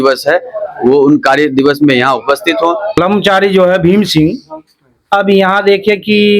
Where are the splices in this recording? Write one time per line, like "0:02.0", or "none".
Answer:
0:03.0